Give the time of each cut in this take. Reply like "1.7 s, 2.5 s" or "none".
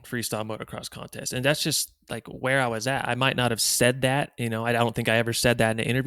none